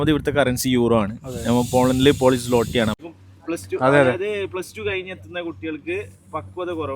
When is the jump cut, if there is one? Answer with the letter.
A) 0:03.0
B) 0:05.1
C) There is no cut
A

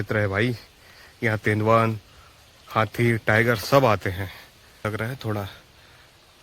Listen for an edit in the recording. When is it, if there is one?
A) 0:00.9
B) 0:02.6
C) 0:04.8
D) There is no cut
C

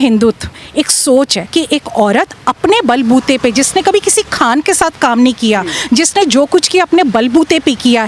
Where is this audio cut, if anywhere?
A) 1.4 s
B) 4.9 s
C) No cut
A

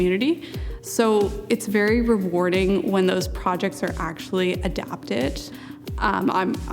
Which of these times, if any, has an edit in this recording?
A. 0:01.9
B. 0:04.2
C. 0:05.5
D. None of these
C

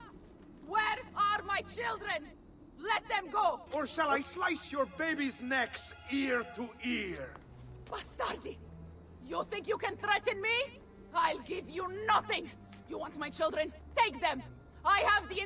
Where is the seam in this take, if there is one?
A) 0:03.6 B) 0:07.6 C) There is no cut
A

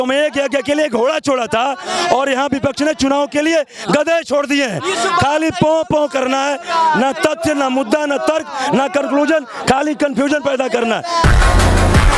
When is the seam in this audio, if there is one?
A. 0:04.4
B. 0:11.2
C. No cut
B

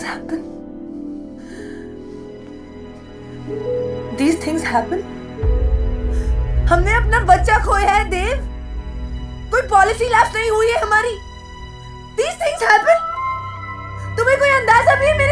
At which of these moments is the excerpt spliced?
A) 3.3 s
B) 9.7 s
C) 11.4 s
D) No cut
D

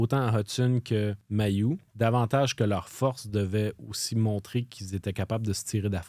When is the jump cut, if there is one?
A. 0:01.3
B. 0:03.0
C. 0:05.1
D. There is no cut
A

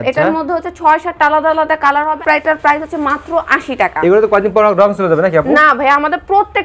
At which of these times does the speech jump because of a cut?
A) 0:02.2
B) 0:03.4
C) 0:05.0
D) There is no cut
A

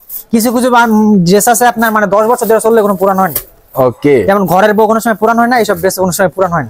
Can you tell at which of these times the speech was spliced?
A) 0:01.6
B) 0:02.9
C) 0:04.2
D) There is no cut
D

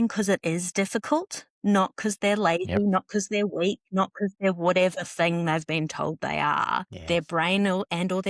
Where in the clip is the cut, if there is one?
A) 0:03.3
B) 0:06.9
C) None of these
B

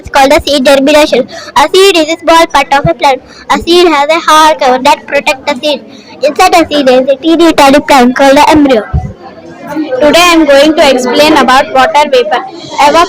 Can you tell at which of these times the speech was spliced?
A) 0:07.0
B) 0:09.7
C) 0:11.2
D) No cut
B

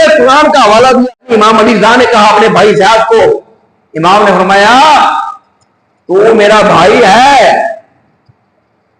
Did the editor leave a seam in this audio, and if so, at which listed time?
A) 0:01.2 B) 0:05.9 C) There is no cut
A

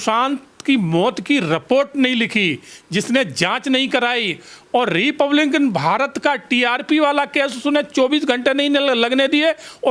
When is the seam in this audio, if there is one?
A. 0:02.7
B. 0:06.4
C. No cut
C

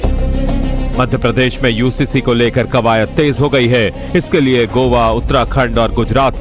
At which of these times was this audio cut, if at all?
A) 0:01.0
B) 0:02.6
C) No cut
C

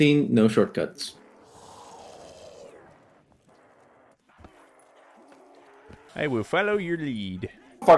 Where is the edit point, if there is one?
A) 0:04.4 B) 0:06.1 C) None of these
B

